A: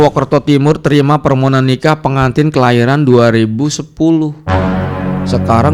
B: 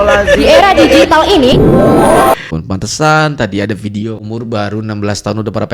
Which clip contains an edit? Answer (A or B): B